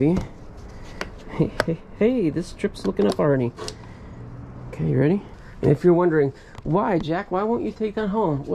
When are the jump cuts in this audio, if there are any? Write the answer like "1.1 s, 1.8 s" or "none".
5.4 s